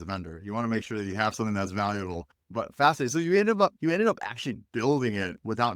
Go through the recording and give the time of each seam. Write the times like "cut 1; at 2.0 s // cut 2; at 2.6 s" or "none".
none